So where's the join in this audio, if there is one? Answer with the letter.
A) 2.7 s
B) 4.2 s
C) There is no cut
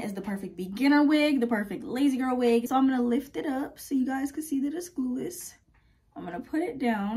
A